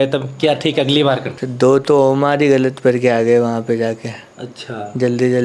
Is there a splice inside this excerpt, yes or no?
yes